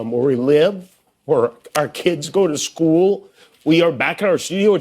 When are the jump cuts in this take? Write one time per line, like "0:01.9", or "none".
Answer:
none